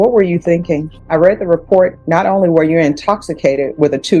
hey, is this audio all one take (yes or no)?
no